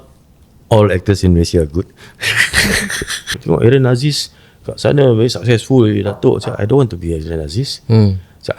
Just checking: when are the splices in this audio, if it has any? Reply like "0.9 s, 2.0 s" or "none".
3.3 s